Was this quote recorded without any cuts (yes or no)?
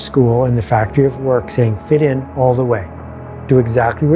yes